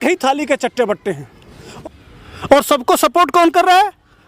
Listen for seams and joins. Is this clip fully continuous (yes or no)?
no